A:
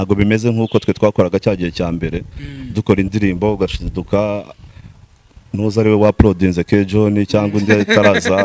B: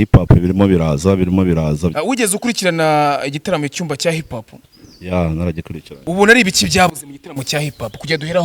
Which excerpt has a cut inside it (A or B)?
B